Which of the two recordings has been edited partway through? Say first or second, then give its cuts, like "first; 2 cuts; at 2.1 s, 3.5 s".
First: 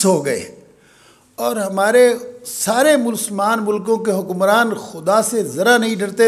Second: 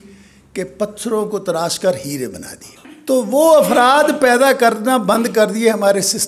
second; 1 cut; at 2.9 s